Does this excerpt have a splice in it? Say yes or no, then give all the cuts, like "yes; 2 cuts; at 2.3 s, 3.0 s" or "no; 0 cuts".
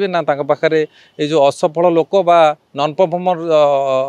no; 0 cuts